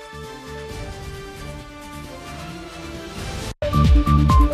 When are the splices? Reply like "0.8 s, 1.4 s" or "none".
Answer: 3.5 s